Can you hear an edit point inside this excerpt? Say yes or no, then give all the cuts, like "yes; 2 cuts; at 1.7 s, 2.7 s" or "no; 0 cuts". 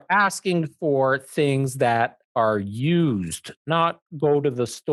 no; 0 cuts